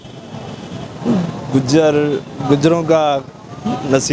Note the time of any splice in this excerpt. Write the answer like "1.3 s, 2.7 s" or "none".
none